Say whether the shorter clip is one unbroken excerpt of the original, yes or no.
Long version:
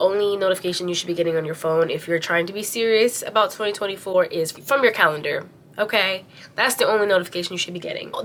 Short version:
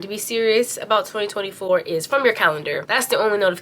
no